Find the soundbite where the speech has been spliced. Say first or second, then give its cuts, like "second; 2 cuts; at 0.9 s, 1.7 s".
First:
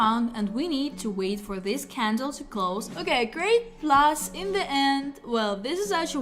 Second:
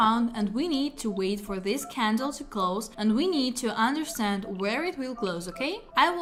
first; 1 cut; at 2.9 s